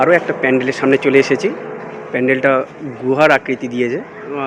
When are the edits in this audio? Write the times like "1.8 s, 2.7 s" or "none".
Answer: none